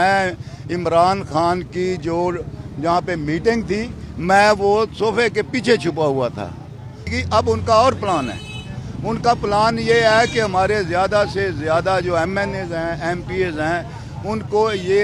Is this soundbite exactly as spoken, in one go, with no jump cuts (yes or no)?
no